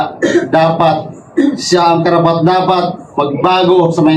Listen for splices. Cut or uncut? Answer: uncut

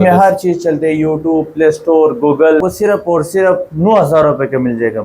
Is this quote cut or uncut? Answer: cut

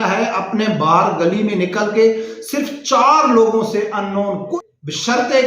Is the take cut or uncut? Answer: cut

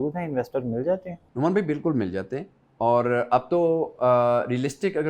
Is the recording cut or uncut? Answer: cut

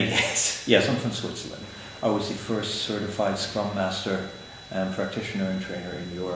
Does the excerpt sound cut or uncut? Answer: uncut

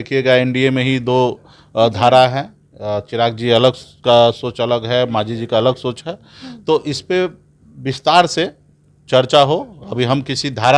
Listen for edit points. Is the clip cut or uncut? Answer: uncut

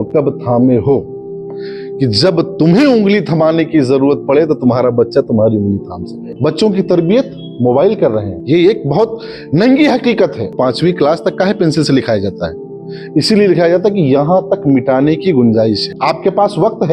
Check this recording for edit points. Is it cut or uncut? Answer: cut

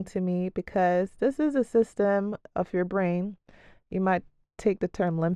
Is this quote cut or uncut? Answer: uncut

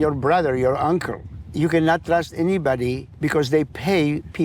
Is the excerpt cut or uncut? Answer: cut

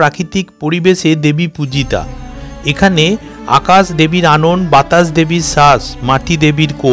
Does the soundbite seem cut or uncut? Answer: uncut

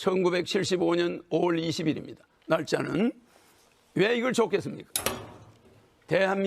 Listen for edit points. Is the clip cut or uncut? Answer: uncut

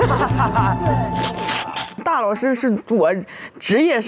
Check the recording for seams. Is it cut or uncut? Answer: cut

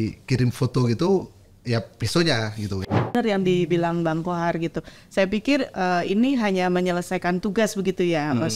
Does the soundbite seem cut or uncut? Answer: cut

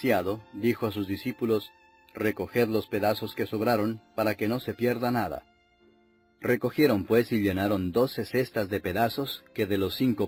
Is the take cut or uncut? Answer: uncut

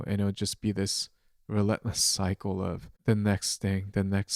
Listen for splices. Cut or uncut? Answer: cut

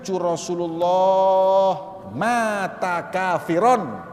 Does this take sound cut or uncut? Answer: uncut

